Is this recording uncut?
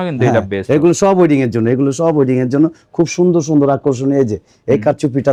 yes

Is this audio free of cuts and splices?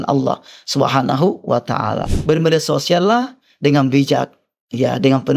no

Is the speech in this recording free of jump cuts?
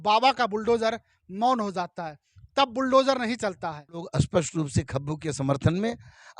no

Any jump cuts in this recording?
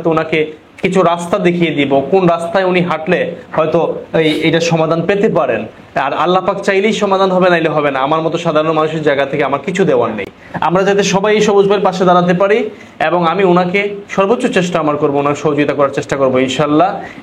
no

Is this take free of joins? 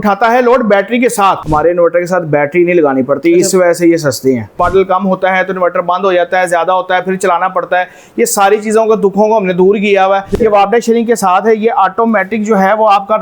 no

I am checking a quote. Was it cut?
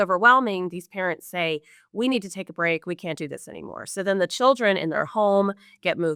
no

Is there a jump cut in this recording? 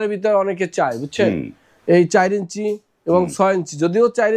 no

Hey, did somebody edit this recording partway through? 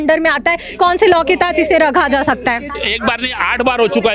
yes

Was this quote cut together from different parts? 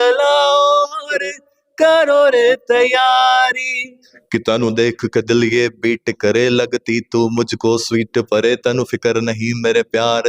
yes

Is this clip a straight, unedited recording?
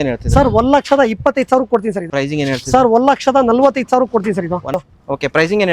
no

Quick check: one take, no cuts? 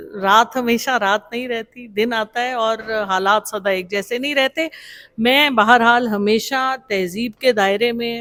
yes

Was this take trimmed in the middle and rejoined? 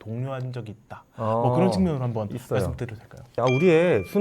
yes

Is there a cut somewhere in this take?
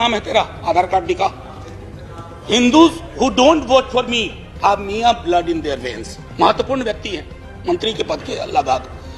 no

